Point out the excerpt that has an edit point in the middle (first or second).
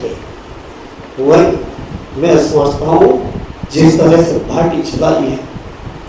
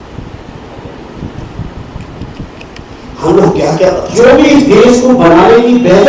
second